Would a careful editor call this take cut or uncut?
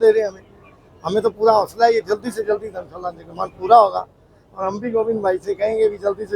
uncut